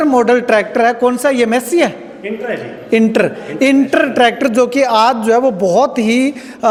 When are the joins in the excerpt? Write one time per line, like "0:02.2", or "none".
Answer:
none